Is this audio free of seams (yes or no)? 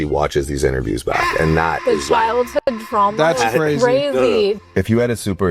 yes